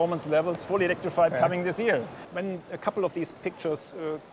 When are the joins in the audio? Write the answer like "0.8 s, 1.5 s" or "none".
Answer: 2.2 s